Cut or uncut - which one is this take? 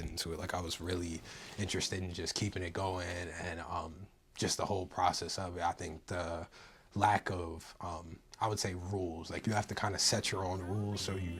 uncut